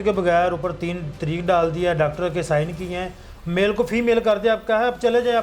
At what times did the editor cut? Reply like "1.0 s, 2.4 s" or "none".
none